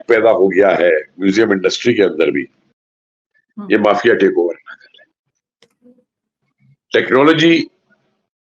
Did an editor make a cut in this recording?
no; 0 cuts

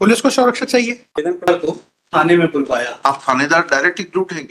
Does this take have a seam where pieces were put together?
yes; 1 cut; at 1.5 s

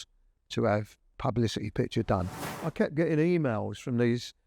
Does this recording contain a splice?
yes; 2 cuts; at 1.0 s, 2.4 s

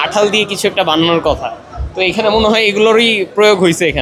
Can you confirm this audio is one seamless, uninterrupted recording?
yes; 0 cuts

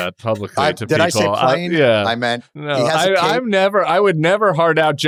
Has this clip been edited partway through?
no; 0 cuts

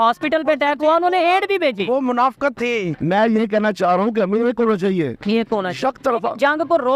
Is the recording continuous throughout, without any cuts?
no; 1 cut; at 3.0 s

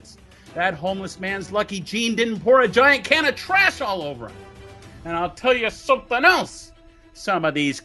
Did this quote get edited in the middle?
no; 0 cuts

